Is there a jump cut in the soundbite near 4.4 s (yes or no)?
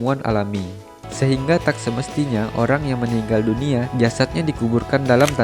no